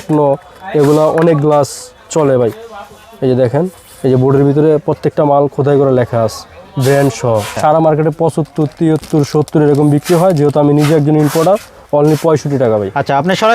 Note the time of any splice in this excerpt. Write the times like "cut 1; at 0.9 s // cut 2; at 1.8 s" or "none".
cut 1; at 7.5 s